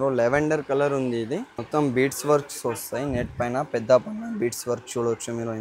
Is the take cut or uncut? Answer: cut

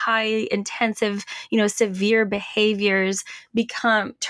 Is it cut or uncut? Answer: uncut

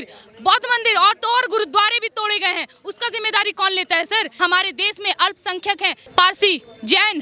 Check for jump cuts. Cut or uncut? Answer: cut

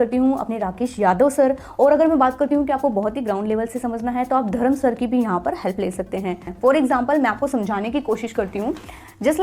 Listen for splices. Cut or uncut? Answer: cut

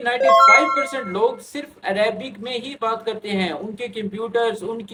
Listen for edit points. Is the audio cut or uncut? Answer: uncut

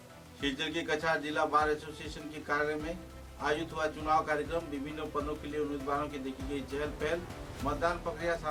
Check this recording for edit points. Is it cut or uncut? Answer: uncut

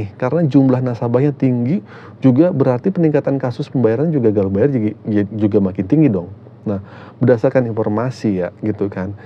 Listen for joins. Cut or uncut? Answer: uncut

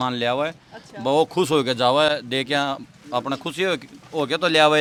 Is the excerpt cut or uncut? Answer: uncut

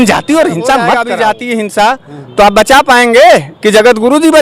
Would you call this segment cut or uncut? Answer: cut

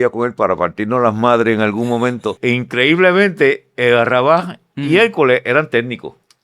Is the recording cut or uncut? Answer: cut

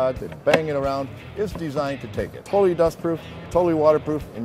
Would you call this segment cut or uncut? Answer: cut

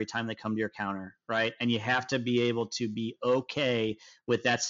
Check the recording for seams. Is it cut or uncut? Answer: uncut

